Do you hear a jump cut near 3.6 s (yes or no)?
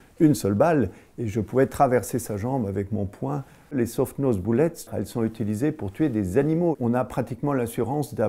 no